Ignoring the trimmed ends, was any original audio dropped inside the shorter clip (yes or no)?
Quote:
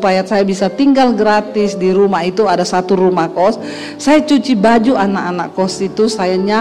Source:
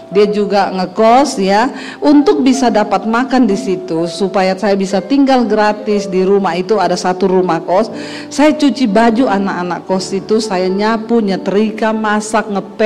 no